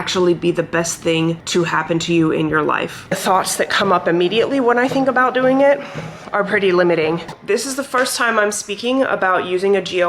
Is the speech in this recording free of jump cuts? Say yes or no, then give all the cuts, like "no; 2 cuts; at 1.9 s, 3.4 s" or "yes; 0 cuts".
no; 2 cuts; at 3.2 s, 7.3 s